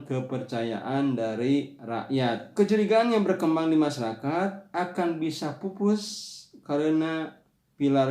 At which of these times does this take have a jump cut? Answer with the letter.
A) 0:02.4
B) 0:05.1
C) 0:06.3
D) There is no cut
A